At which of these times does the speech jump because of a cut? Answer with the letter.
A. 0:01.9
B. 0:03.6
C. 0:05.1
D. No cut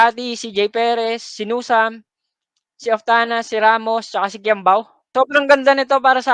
C